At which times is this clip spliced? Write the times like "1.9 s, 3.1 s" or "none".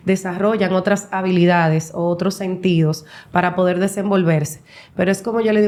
none